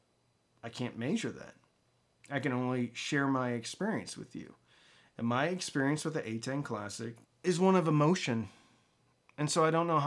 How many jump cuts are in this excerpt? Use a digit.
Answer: 1